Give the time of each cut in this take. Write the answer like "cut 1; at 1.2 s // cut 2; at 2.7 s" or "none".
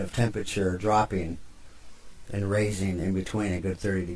cut 1; at 1.7 s

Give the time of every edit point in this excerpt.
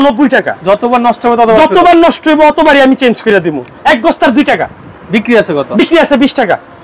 cut 1; at 3.8 s

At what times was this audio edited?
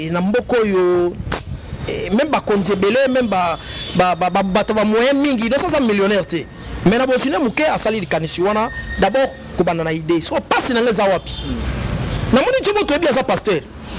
none

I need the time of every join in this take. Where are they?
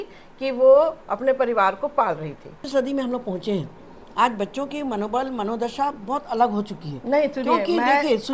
cut 1; at 2.6 s

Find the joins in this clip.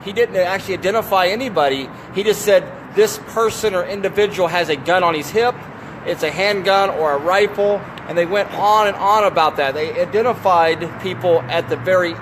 cut 1; at 8.3 s

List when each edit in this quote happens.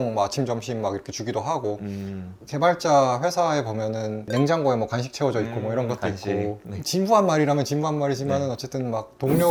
none

